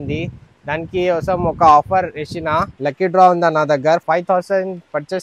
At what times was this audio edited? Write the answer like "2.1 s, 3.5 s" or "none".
2.7 s, 4.0 s